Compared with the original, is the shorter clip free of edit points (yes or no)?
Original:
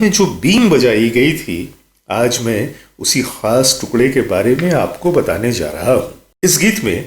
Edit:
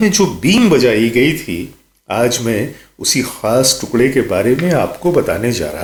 yes